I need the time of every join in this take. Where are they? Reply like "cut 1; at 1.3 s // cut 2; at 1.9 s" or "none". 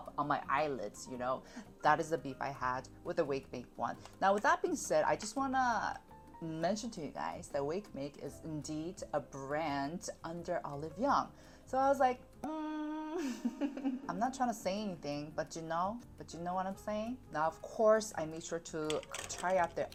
none